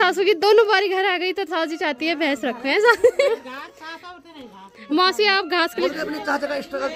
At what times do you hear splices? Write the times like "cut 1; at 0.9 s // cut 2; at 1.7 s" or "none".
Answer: cut 1; at 3.3 s // cut 2; at 5.9 s